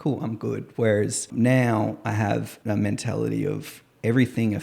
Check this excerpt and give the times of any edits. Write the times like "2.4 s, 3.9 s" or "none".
1.3 s, 2.5 s